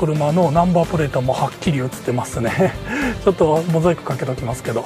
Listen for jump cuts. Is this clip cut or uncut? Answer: uncut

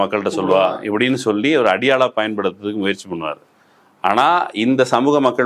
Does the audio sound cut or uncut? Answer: uncut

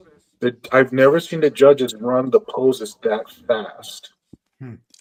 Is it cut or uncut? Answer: uncut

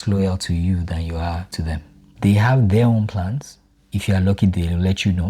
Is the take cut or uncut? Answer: cut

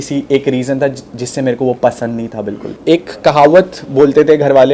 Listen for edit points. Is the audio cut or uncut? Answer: cut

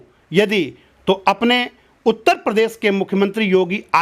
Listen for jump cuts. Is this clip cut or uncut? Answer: uncut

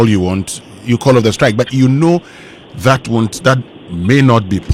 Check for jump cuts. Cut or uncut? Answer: uncut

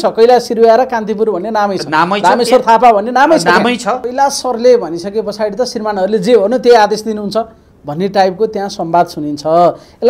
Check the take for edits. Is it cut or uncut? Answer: cut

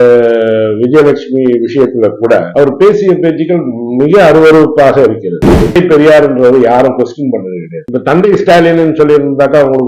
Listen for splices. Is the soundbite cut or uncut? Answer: cut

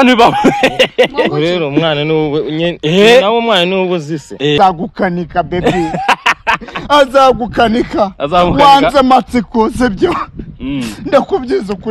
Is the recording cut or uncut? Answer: cut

